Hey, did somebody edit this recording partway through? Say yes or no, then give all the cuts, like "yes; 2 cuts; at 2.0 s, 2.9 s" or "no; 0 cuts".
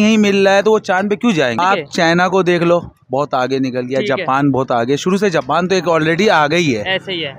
yes; 1 cut; at 1.6 s